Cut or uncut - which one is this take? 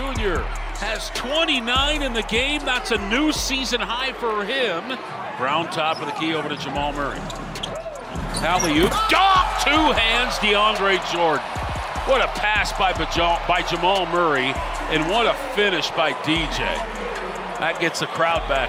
uncut